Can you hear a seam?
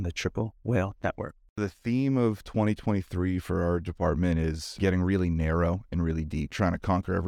yes; 3 cuts; at 1.6 s, 4.7 s, 6.5 s

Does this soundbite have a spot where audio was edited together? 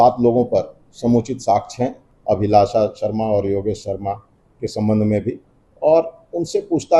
yes; 1 cut; at 2.1 s

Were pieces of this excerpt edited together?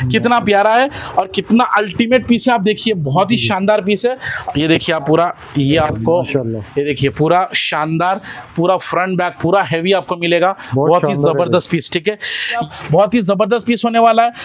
yes; 2 cuts; at 4.3 s, 12.6 s

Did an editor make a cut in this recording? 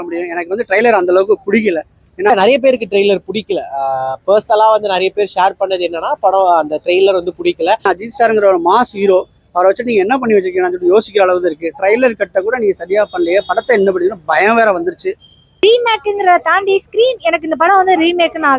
yes; 3 cuts; at 2.3 s, 7.9 s, 15.6 s

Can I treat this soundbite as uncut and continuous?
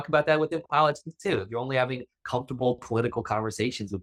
yes; 0 cuts

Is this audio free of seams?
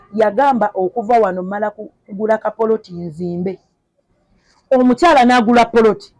yes; 0 cuts

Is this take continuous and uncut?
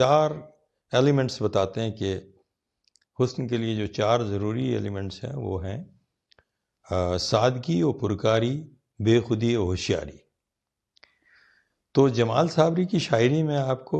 yes; 0 cuts

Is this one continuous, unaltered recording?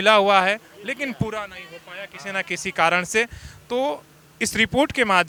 yes; 0 cuts

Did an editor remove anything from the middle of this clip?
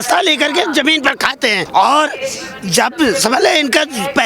no; 0 cuts

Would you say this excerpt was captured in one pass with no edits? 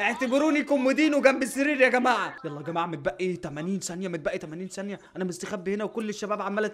no; 1 cut; at 2.4 s

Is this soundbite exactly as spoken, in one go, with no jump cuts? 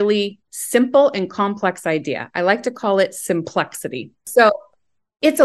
no; 1 cut; at 4.2 s

